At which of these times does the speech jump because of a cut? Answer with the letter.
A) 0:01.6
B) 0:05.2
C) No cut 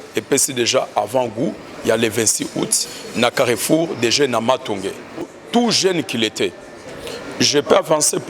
B